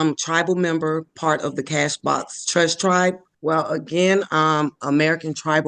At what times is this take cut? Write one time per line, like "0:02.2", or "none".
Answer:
0:03.3